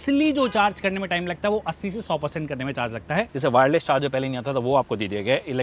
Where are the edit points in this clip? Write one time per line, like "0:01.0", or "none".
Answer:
0:03.3